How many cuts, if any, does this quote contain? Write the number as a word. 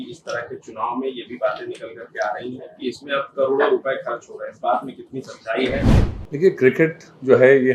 one